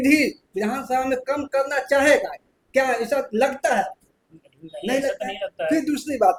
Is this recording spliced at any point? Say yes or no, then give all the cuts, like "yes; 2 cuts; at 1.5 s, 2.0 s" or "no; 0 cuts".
no; 0 cuts